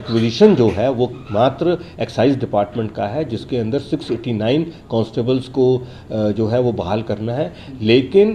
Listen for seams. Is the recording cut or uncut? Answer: uncut